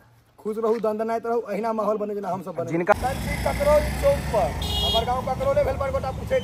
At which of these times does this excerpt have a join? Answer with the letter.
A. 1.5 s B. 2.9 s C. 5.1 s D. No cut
B